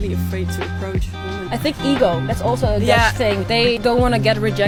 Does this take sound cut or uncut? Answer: uncut